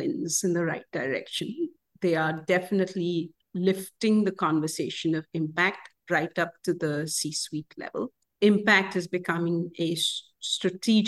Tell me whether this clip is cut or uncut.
uncut